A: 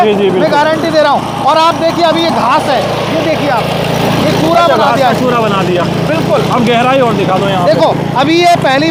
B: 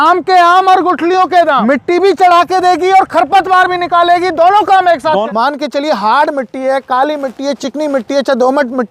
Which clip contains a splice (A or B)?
B